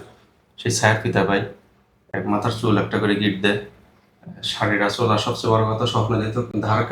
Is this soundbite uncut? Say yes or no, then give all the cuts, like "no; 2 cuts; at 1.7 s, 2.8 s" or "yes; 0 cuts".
yes; 0 cuts